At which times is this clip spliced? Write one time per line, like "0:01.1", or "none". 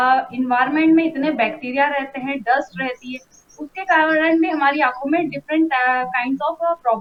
none